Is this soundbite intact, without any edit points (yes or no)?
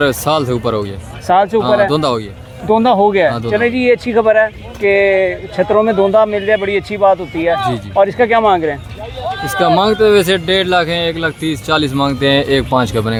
yes